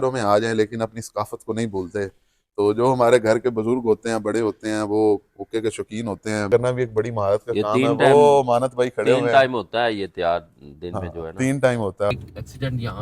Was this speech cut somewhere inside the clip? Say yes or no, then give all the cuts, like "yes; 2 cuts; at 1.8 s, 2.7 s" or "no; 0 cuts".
yes; 2 cuts; at 6.5 s, 12.1 s